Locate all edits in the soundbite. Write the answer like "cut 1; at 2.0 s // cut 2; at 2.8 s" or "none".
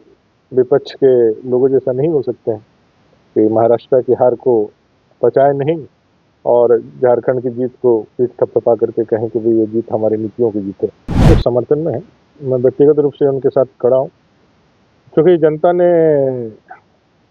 cut 1; at 11.2 s